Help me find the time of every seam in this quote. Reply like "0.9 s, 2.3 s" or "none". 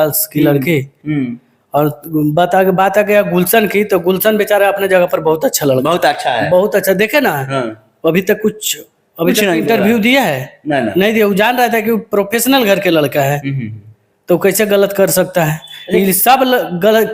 none